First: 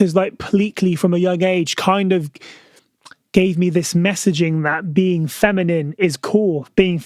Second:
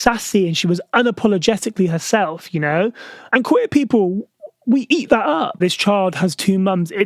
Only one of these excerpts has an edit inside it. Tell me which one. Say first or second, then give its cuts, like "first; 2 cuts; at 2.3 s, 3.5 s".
second; 1 cut; at 5.6 s